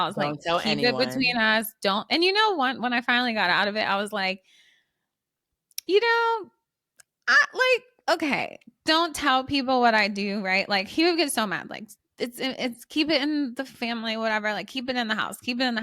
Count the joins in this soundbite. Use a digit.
0